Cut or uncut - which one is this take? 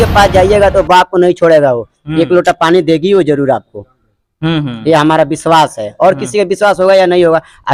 uncut